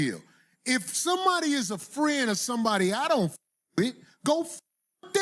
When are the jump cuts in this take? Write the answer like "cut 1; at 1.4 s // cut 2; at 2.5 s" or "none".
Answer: cut 1; at 2.2 s